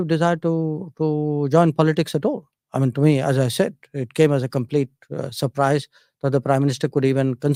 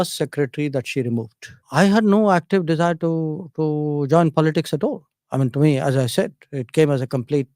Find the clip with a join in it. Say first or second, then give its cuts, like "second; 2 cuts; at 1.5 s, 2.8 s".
second; 1 cut; at 1.6 s